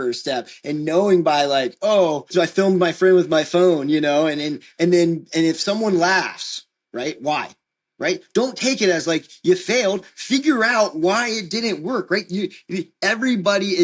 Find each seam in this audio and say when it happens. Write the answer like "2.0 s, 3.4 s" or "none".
2.3 s